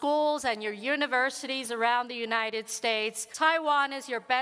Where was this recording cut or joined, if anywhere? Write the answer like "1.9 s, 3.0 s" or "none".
3.2 s